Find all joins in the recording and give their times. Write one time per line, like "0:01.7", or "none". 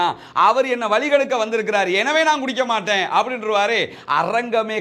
none